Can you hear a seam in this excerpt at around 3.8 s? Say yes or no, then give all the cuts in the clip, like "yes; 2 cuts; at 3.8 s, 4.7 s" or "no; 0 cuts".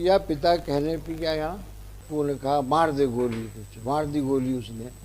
no; 1 cut; at 2.0 s